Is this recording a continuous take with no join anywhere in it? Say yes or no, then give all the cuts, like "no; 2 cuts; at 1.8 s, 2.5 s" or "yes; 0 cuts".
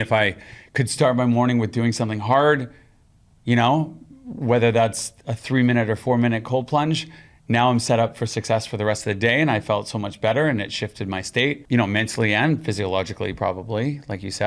no; 1 cut; at 11.6 s